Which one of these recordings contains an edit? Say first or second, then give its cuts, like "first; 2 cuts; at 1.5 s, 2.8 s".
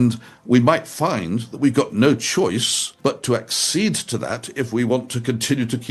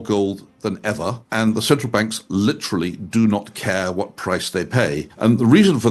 second; 2 cuts; at 1.2 s, 5.1 s